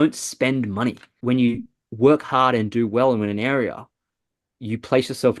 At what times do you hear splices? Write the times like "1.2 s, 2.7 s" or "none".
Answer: 1.1 s